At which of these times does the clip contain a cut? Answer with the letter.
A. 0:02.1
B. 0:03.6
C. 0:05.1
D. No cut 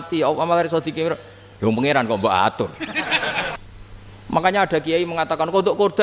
B